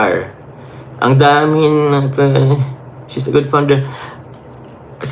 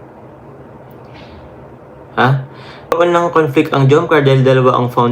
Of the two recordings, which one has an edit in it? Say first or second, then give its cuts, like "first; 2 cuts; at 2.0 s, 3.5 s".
second; 1 cut; at 2.9 s